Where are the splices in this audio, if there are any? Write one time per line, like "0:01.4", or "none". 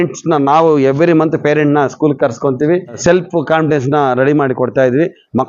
0:03.0